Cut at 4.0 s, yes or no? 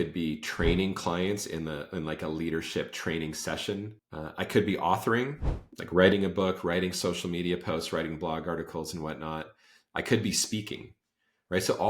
yes